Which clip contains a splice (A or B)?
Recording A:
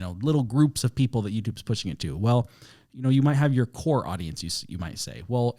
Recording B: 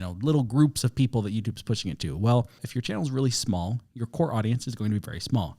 B